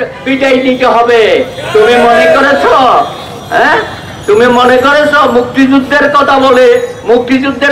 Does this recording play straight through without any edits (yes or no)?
yes